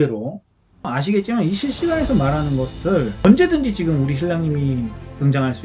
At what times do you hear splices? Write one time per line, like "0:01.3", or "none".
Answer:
0:00.9
0:03.2